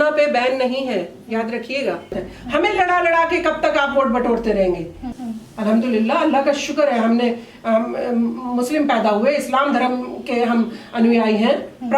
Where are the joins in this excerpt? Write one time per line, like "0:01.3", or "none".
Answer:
0:02.3
0:05.0